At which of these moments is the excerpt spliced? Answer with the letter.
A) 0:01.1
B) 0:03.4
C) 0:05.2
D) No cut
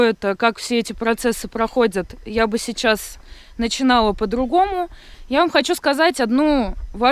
D